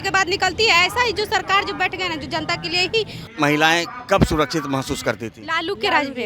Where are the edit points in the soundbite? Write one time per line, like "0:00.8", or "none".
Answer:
0:03.2